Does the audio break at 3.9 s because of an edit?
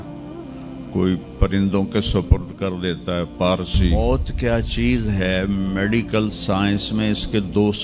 yes; 1 cut; at 3.9 s

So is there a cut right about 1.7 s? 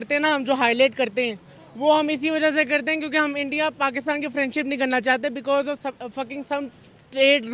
no; 0 cuts

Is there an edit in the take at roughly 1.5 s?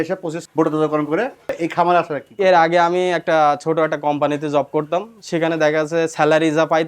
yes; 1 cut; at 1.5 s

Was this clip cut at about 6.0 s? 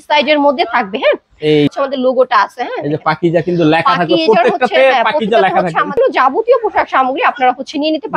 yes; 2 cuts; at 1.7 s, 6.0 s

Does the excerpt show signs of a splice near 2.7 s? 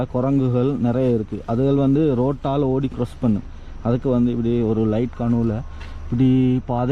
no; 0 cuts

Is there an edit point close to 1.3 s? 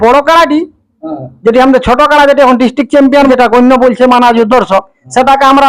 no; 1 cut; at 3.3 s

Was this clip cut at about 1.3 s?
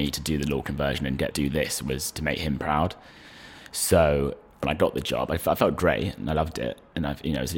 yes; 2 cuts; at 1.3 s, 4.6 s

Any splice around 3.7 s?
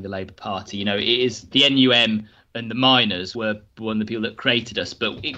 no; 1 cut; at 1.5 s

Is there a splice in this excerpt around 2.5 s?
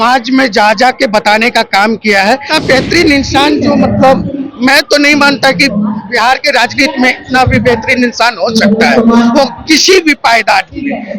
yes; 1 cut; at 2.5 s

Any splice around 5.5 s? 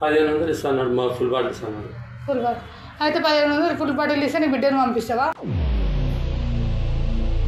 no; 0 cuts

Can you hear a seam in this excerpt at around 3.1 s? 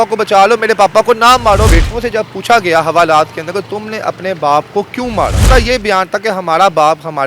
no; 2 cuts; at 1.7 s, 5.4 s

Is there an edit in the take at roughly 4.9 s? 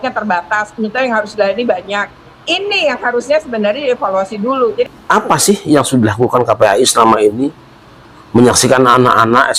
yes; 1 cut; at 4.9 s

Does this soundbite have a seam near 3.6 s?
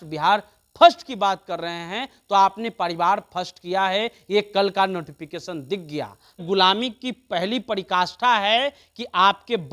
no; 1 cut; at 6.4 s

